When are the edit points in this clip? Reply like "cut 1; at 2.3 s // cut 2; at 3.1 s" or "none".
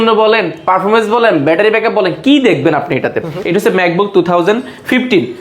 cut 1; at 3.3 s